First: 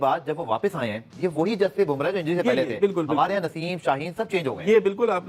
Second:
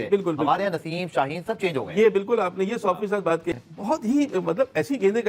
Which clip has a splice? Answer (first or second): second